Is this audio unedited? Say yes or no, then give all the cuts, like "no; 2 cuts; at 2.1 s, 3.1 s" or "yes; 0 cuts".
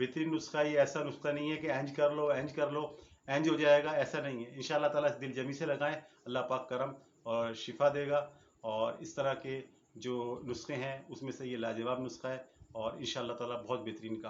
yes; 0 cuts